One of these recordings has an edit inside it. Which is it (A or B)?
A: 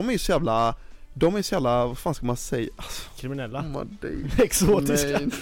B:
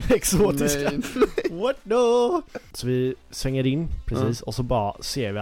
B